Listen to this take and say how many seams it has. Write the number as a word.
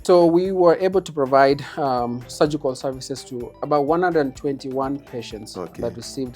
one